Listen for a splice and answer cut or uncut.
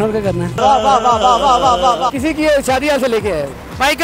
cut